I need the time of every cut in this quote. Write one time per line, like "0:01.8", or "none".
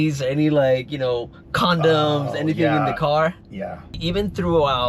0:03.9